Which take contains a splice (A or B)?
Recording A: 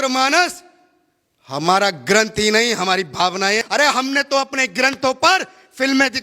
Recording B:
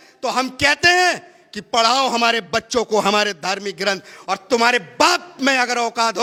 A